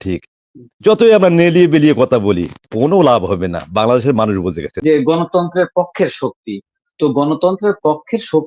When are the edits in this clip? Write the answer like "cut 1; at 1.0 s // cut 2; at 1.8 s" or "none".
cut 1; at 4.8 s